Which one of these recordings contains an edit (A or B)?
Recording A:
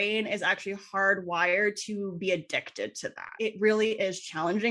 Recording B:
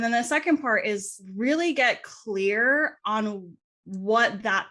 A